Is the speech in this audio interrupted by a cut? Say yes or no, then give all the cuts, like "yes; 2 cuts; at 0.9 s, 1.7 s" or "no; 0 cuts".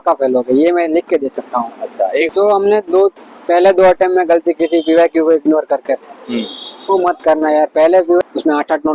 yes; 2 cuts; at 2.3 s, 8.2 s